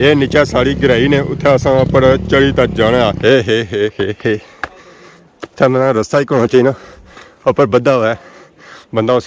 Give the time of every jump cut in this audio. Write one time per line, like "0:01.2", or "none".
0:03.2